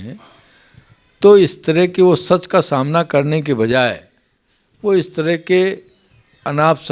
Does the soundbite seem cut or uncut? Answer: uncut